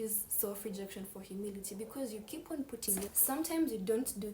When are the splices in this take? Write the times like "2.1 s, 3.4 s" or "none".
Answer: 3.1 s

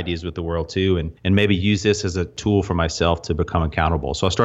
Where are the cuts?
1.1 s, 2.3 s

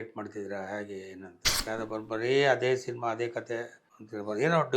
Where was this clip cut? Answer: 1.6 s

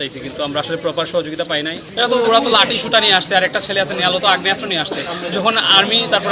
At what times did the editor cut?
1.8 s

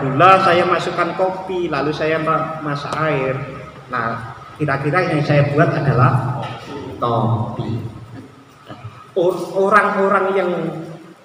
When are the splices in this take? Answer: none

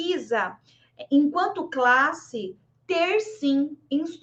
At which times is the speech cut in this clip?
none

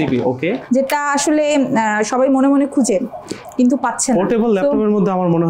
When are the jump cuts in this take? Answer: none

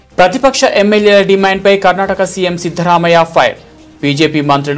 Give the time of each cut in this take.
none

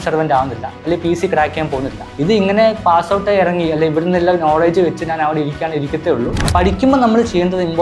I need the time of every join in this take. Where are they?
2.0 s, 6.4 s

